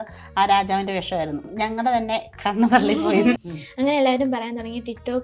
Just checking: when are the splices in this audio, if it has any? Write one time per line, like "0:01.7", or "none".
0:01.5
0:03.3